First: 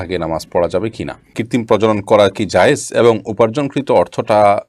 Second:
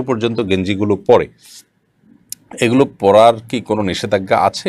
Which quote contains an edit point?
first; 1 cut; at 1.4 s

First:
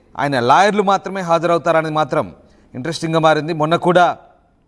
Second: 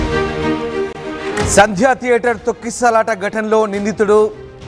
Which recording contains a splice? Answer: second; 1 cut; at 1.0 s

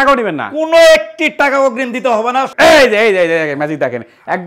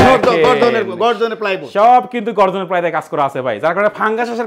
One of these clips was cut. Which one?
first; 1 cut; at 2.5 s

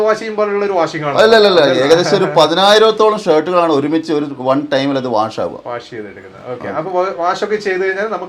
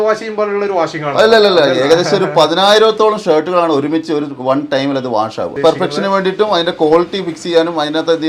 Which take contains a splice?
second; 1 cut; at 5.5 s

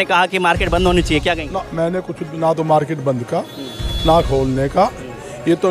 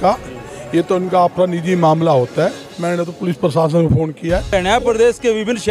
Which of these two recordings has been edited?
second; 1 cut; at 4.5 s

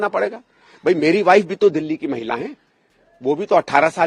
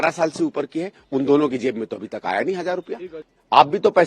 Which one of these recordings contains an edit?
second; 1 cut; at 3.1 s

